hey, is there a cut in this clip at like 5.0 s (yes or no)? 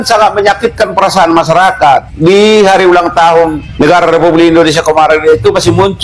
no